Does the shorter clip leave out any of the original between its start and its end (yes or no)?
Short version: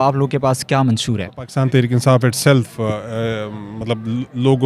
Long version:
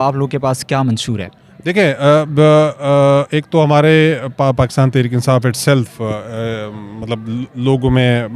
yes